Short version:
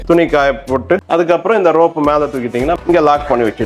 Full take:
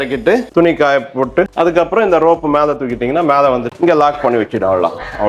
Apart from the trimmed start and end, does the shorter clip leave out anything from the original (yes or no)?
yes